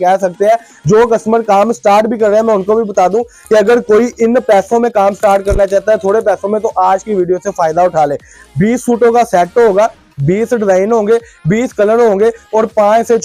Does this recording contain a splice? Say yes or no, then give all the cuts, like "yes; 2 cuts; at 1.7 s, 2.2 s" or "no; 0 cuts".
no; 0 cuts